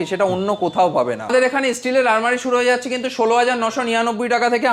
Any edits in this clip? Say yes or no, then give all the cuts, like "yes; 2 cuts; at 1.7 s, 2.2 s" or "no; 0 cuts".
yes; 1 cut; at 1.2 s